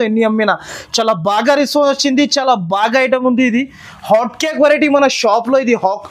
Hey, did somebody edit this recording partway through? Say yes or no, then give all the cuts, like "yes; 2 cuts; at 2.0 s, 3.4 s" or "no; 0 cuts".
no; 0 cuts